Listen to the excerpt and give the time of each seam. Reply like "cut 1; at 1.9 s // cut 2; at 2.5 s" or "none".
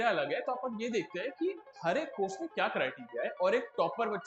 none